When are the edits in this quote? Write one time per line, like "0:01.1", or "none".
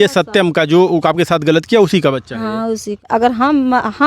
0:03.1